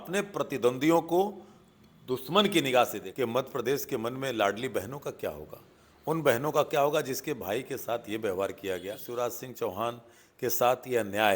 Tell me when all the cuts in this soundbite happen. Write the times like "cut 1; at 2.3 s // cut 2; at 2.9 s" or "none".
cut 1; at 3.1 s // cut 2; at 9.0 s